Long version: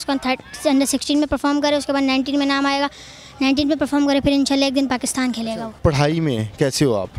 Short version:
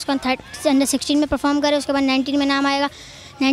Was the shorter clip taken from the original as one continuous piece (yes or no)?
yes